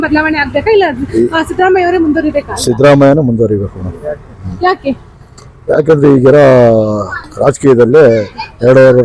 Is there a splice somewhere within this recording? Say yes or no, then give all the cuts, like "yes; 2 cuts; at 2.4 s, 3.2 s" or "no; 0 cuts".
no; 0 cuts